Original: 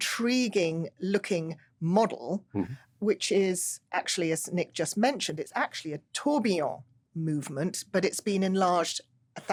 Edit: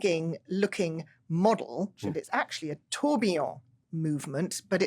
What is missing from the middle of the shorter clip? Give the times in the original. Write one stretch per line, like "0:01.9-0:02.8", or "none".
0:02.6-0:05.3